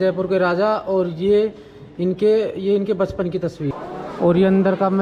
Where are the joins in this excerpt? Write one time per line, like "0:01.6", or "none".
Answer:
0:03.7